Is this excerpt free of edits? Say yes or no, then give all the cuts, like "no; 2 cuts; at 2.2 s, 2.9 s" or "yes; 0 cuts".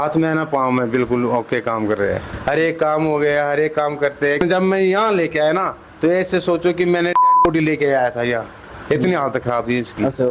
yes; 0 cuts